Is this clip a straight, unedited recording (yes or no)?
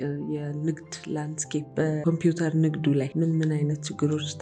no